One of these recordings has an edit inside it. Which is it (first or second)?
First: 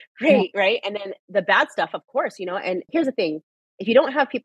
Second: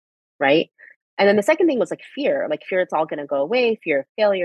first